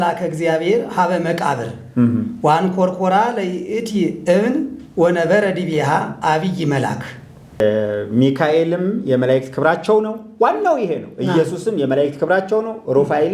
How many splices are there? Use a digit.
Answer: 1